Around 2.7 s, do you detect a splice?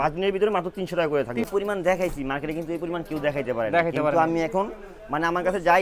no; 1 cut; at 1.5 s

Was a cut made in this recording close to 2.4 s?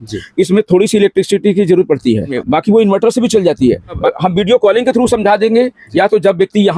yes; 2 cuts; at 2.4 s, 4.0 s

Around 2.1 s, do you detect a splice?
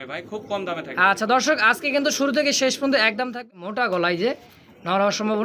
no; 1 cut; at 3.3 s

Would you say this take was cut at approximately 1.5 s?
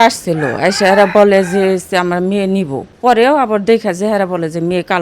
no; 1 cut; at 2.9 s

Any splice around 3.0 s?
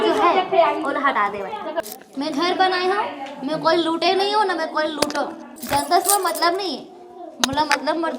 no; 2 cuts; at 1.8 s, 5.5 s

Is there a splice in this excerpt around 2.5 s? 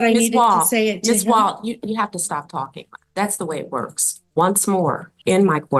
no; 1 cut; at 4.2 s

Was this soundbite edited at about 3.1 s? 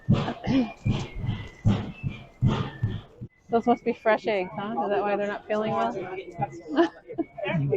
yes; 1 cut; at 3.1 s

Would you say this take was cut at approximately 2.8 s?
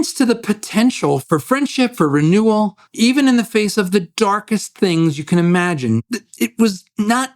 yes; 3 cuts; at 1.2 s, 2.8 s, 6.0 s

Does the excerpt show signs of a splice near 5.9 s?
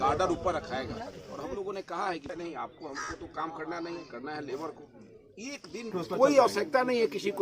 yes; 2 cuts; at 2.3 s, 5.9 s

